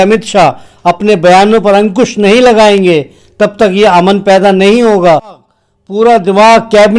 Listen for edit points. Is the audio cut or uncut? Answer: cut